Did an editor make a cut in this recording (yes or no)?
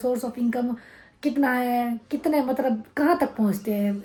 no